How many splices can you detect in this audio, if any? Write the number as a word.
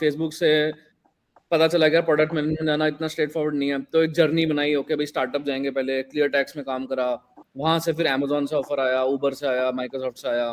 zero